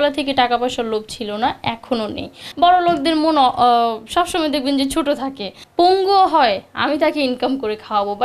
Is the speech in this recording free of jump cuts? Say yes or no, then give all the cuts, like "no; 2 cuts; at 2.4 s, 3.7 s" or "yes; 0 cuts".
no; 2 cuts; at 2.4 s, 5.6 s